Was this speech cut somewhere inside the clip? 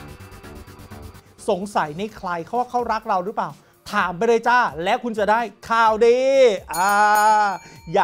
yes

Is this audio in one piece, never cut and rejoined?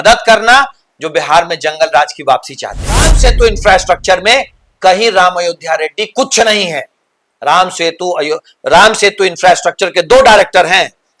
no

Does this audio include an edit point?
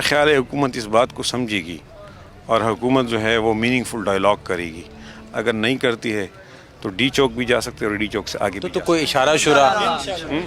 no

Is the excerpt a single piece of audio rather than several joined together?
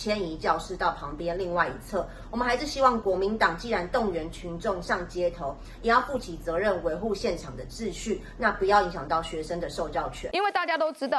no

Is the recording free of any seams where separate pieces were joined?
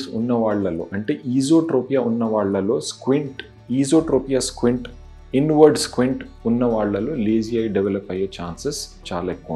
yes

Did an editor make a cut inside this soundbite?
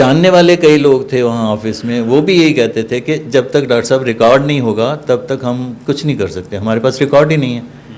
no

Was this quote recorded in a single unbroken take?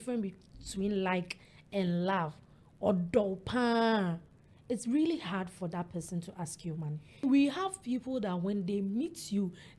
no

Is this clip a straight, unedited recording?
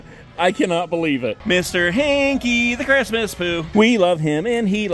no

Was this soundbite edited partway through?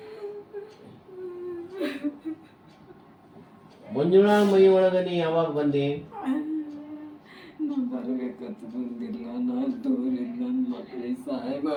no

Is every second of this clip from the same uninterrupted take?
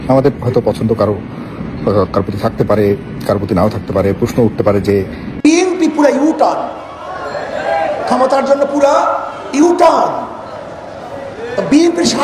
no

